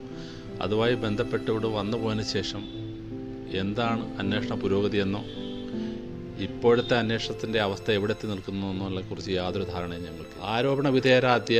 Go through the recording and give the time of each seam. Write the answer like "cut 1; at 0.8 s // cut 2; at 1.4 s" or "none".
cut 1; at 10.1 s

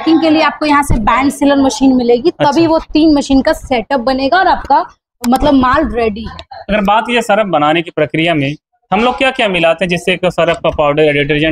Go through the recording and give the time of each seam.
none

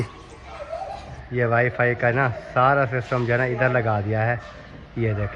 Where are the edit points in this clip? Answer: none

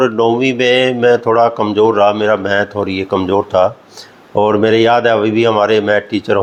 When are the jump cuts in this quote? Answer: none

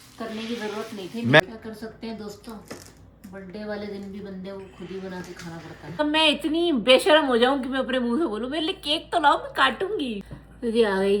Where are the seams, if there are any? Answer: cut 1; at 1.4 s // cut 2; at 6.0 s // cut 3; at 10.2 s

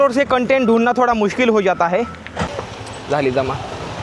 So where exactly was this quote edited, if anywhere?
cut 1; at 3.1 s

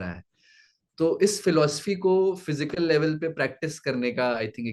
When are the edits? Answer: none

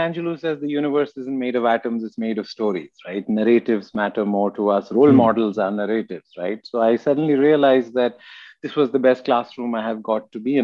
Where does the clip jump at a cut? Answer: none

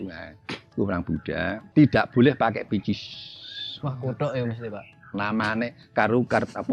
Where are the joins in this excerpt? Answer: cut 1; at 1.6 s

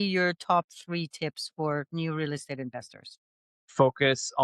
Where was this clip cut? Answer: cut 1; at 3.3 s

